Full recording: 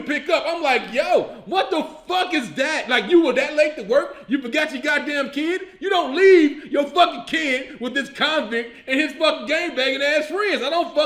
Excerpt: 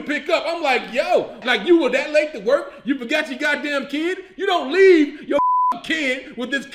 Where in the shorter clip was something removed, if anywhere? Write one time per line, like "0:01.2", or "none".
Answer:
0:01.4